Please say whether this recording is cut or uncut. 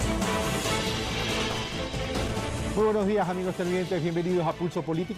uncut